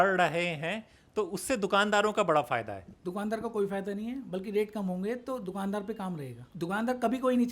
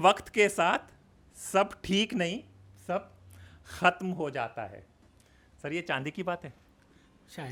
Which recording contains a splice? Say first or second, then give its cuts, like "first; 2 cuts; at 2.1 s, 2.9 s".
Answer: first; 2 cuts; at 2.8 s, 6.4 s